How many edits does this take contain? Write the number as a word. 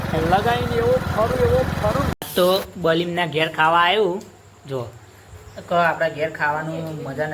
one